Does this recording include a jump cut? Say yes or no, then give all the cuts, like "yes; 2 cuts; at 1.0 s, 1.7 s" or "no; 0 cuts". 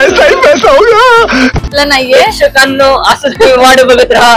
yes; 1 cut; at 1.8 s